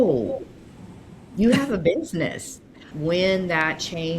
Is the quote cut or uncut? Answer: cut